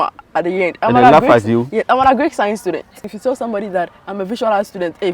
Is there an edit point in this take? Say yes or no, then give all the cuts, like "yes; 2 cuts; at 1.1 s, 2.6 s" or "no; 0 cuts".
yes; 1 cut; at 3.1 s